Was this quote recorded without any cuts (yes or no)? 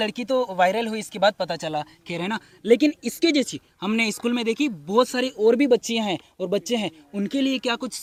yes